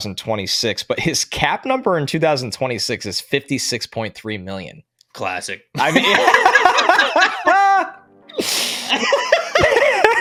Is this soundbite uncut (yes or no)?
yes